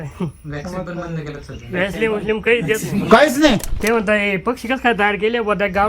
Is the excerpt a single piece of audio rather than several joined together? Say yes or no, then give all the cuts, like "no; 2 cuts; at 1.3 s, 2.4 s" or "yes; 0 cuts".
no; 1 cut; at 3.7 s